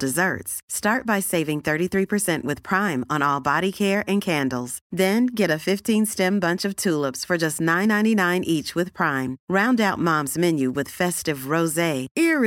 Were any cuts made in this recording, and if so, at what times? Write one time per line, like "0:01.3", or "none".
none